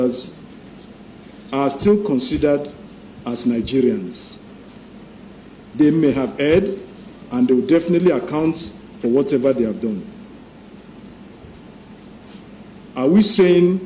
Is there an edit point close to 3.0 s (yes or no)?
no